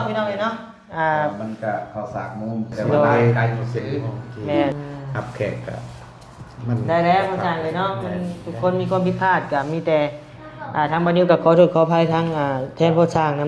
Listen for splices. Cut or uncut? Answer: cut